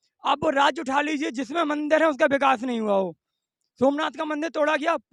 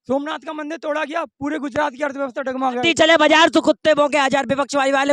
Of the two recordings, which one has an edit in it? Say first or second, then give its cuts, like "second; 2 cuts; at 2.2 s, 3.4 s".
second; 1 cut; at 2.8 s